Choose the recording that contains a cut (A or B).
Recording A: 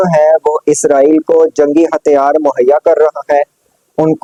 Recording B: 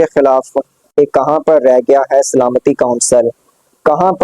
B